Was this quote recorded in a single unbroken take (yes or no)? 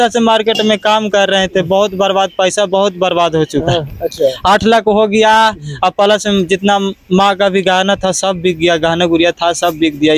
yes